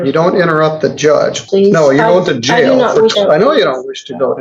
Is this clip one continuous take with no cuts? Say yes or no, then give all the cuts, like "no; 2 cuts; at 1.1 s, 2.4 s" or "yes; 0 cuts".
no; 2 cuts; at 1.4 s, 3.1 s